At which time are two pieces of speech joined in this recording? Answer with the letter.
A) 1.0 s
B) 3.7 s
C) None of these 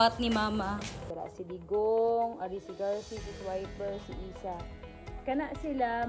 A